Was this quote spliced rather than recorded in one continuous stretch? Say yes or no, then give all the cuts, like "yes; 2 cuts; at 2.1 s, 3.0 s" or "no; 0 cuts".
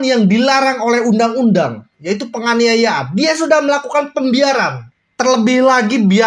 yes; 1 cut; at 4.8 s